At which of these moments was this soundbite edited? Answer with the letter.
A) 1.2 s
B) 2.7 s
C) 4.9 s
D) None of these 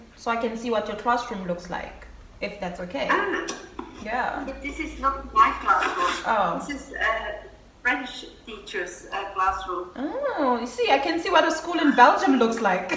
D